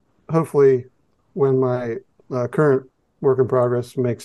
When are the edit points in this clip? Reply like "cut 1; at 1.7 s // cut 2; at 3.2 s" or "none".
none